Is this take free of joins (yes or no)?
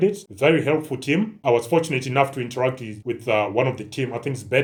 yes